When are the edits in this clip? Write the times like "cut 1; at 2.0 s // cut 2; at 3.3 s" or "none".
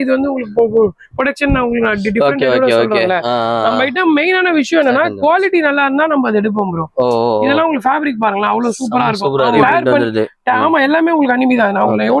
cut 1; at 9.6 s